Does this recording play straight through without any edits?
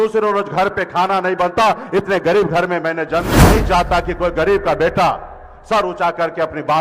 no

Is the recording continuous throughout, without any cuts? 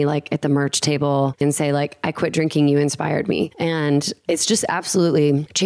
no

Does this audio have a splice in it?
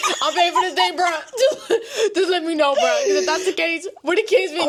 no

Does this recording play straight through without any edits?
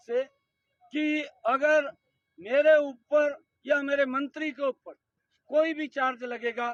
yes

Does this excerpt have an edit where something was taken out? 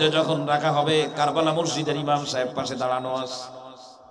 no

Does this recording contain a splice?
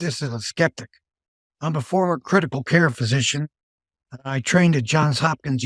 no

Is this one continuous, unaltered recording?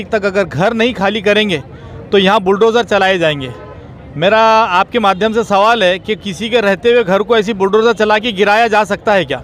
yes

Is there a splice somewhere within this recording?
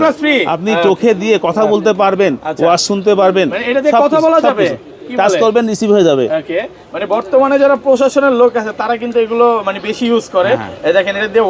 no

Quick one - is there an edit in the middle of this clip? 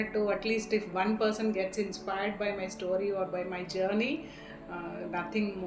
no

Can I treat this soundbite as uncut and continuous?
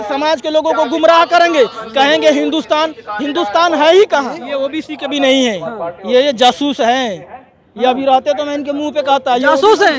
no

